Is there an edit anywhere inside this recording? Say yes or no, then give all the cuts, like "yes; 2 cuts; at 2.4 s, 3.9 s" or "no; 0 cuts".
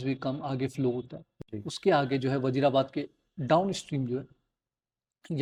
no; 0 cuts